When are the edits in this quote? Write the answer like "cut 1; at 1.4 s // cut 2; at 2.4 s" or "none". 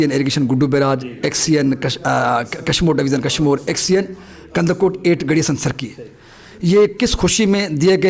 none